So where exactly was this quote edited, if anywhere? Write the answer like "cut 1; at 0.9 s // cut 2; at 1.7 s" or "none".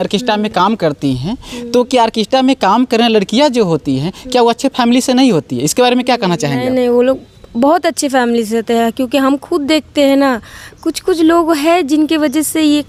none

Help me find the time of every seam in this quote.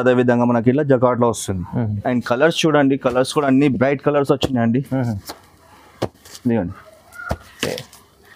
cut 1; at 2.0 s

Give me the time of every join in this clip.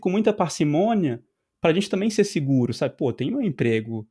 none

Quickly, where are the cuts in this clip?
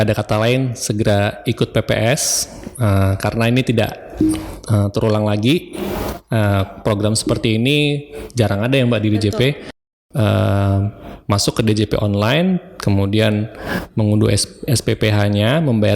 cut 1; at 9.7 s

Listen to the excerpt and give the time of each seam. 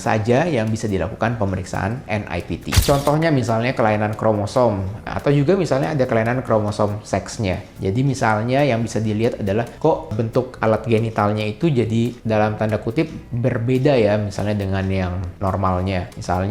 cut 1; at 2.8 s // cut 2; at 5.1 s // cut 3; at 7.7 s

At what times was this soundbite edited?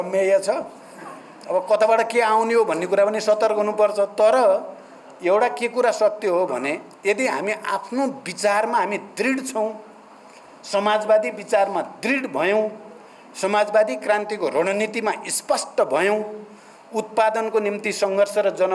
none

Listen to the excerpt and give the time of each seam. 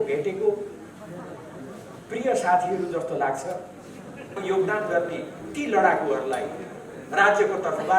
cut 1; at 4.4 s

